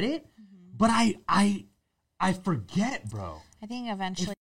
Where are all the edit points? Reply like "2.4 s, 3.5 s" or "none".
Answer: none